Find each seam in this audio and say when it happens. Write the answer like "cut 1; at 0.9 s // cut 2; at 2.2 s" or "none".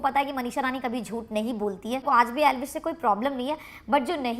cut 1; at 2.0 s